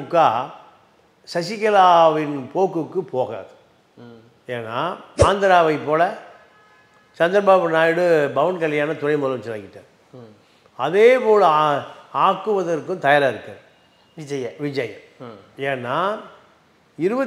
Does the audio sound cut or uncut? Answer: cut